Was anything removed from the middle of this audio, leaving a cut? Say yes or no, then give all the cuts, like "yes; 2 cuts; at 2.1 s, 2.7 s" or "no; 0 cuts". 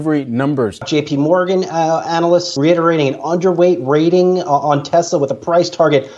yes; 2 cuts; at 0.9 s, 2.5 s